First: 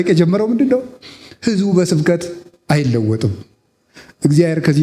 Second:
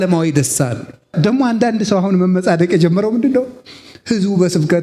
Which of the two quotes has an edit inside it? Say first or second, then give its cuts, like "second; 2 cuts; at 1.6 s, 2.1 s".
second; 1 cut; at 1.1 s